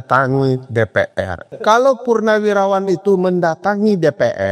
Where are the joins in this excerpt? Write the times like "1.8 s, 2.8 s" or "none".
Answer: 1.4 s